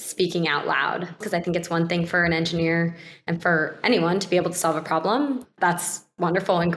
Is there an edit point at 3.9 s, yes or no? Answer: no